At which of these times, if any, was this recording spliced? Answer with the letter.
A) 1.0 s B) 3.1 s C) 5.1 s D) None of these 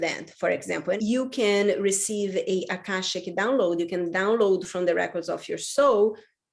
A